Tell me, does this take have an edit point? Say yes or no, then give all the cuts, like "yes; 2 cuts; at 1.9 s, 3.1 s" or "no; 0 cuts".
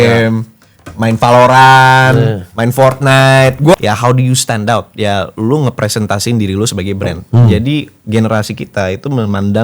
yes; 1 cut; at 3.7 s